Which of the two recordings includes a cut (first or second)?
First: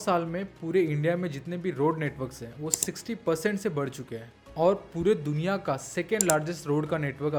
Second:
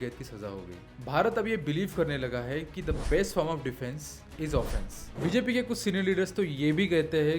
second